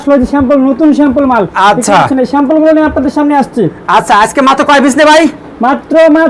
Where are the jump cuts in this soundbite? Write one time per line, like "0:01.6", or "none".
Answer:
none